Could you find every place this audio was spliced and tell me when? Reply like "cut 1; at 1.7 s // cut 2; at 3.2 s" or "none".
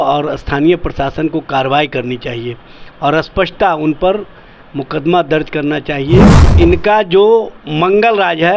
cut 1; at 6.4 s